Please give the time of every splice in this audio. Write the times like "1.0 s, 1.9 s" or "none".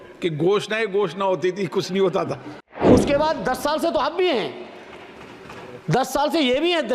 2.9 s